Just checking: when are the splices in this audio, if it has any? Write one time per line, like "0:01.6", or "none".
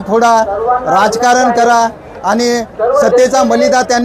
none